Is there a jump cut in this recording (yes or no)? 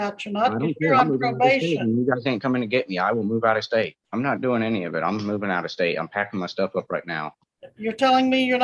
yes